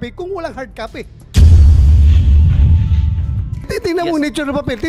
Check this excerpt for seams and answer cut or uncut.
cut